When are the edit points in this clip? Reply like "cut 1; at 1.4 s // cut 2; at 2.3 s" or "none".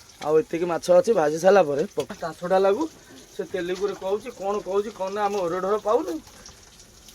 cut 1; at 2.1 s